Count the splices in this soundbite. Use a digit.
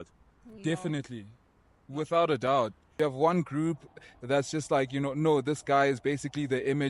1